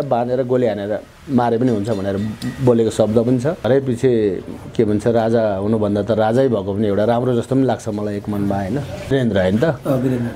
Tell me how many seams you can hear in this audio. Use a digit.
2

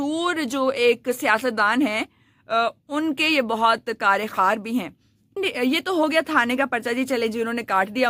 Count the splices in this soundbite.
0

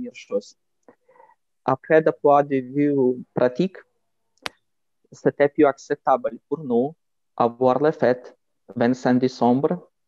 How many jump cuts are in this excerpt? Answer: 0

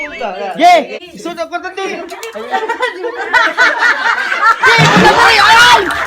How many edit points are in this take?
1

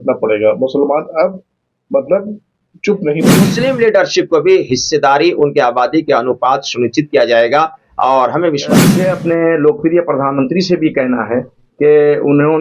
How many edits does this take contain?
2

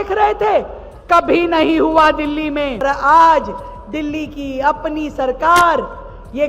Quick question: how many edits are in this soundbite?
1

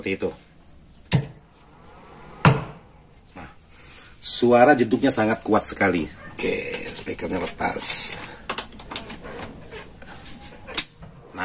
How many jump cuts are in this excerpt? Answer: 1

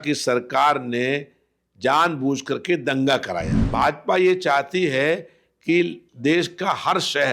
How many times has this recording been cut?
1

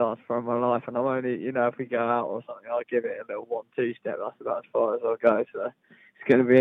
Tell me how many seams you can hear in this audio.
0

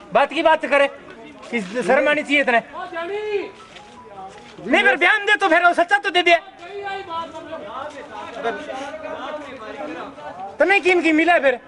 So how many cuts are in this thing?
0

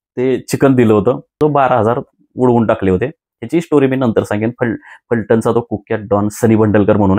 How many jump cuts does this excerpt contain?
1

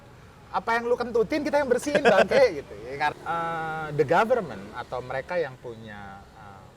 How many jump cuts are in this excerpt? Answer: 1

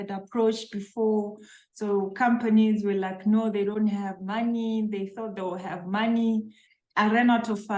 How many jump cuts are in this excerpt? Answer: 1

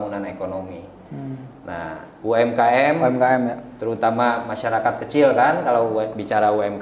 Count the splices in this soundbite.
0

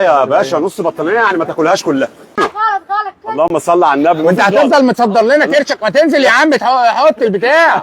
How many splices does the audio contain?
1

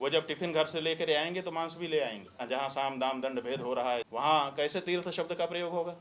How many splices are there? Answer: 2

